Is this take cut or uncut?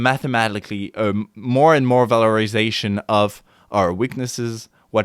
uncut